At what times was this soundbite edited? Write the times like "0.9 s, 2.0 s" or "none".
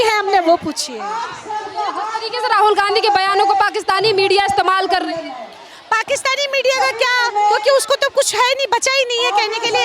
none